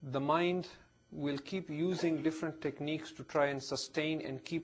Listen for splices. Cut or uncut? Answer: uncut